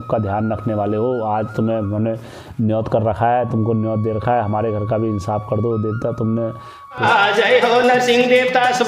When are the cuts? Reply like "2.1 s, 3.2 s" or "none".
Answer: none